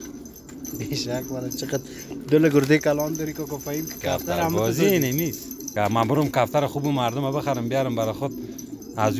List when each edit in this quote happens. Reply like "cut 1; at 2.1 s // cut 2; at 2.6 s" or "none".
cut 1; at 5.7 s